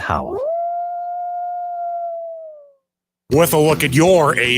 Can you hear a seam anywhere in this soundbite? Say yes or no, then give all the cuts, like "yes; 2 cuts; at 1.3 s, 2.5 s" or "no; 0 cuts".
yes; 1 cut; at 3.0 s